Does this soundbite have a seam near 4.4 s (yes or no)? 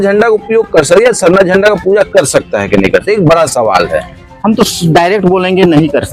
no